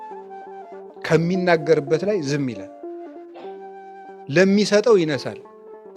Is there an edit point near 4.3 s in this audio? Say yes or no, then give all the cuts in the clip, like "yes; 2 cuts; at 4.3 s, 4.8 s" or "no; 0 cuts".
no; 1 cut; at 1.1 s